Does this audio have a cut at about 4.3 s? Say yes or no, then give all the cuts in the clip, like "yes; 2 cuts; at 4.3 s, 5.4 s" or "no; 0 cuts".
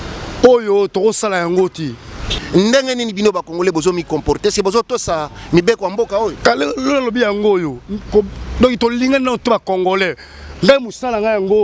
no; 1 cut; at 2.6 s